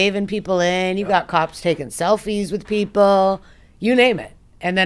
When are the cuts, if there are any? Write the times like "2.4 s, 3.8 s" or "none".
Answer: none